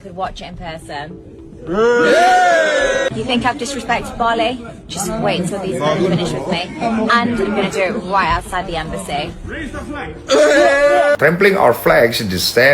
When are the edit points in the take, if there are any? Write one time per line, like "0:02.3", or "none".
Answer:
0:03.1
0:11.2